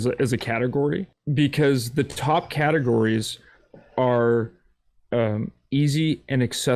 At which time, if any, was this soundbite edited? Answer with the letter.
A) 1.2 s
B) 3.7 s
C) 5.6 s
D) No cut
A